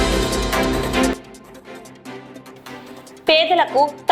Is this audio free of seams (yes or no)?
no